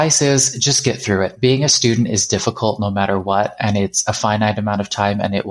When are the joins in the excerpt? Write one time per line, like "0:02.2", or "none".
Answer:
none